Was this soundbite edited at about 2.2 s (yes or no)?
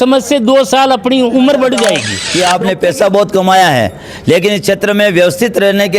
yes